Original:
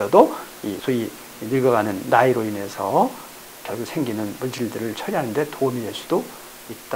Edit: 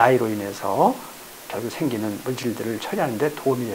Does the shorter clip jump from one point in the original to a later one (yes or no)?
no